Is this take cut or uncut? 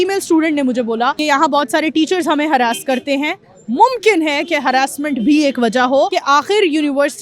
cut